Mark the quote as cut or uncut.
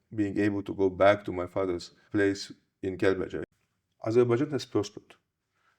cut